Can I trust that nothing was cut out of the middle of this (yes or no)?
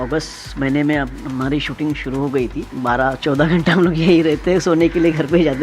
no